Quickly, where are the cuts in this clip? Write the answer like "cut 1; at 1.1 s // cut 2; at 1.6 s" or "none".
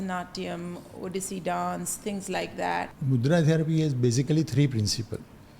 cut 1; at 2.9 s